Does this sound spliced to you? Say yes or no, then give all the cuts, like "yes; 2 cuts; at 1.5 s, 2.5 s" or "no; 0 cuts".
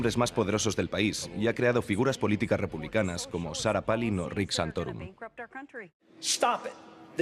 no; 0 cuts